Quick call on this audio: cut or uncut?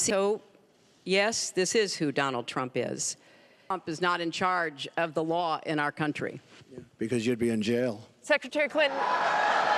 cut